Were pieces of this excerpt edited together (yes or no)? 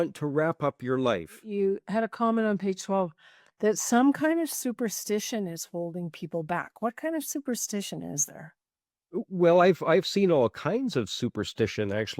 yes